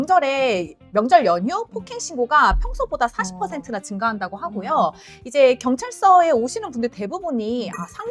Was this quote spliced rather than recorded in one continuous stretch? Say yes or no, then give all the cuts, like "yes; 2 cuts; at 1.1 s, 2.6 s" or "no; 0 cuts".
no; 0 cuts